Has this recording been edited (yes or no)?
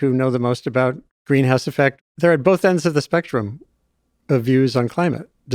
yes